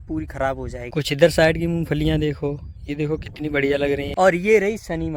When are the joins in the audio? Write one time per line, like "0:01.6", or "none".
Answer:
0:00.9
0:04.1